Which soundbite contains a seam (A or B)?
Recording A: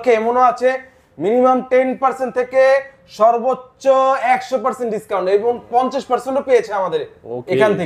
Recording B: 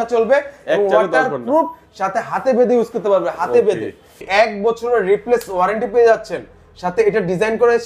B